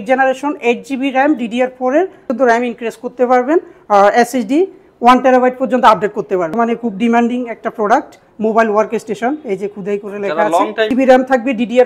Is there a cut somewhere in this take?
yes; 3 cuts; at 2.3 s, 6.5 s, 10.9 s

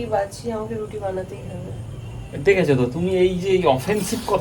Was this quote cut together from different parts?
no; 0 cuts

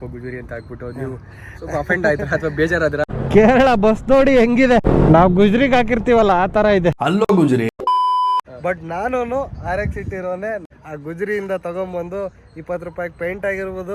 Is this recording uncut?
no; 4 cuts; at 3.0 s, 4.9 s, 8.5 s, 10.6 s

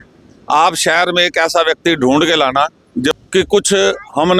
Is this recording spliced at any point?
yes; 1 cut; at 3.1 s

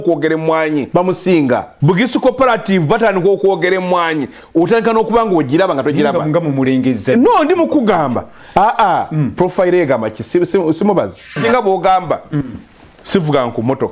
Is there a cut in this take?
yes; 3 cuts; at 0.9 s, 1.7 s, 11.4 s

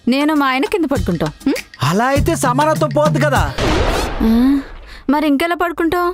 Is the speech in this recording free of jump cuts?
yes; 0 cuts

